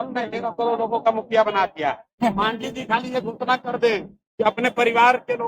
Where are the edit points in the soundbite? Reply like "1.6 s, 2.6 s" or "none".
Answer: 2.1 s